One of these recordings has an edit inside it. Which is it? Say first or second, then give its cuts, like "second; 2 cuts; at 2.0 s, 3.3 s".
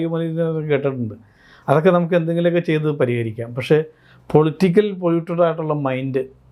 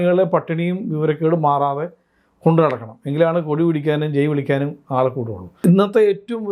second; 1 cut; at 5.6 s